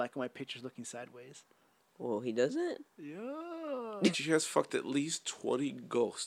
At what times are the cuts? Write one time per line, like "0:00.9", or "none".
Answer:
0:04.1

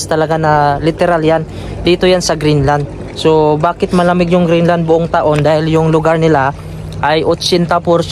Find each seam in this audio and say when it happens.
none

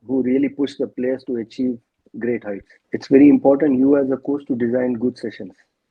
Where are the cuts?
0:02.8

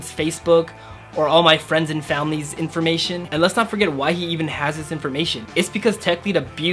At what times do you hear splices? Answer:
0:03.3

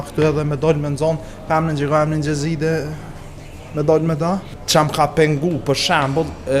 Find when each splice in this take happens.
0:04.5

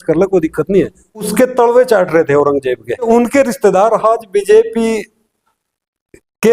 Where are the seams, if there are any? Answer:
0:01.3
0:03.1

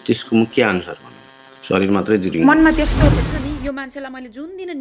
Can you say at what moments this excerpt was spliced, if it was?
0:03.1

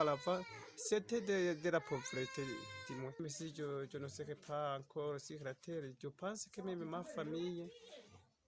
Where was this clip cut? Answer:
0:03.2

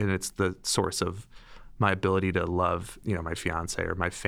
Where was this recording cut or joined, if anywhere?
0:02.9

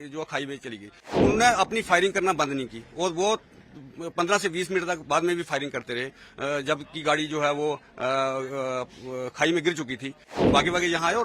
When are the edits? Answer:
0:01.1
0:10.3

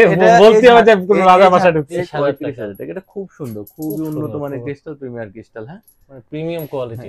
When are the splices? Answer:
0:02.1

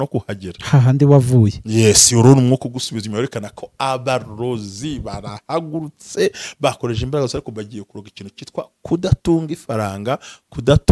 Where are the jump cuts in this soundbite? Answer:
none

